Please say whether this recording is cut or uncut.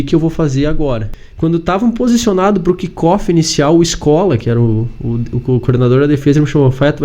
cut